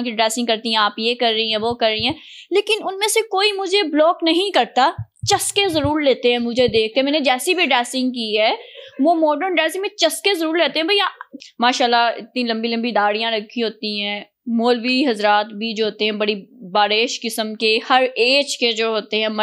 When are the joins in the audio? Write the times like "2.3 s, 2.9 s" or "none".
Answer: 11.2 s